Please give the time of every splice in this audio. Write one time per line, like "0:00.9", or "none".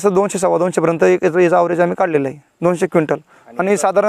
0:02.5